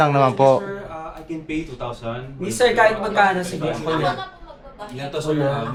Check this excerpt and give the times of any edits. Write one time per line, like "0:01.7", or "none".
none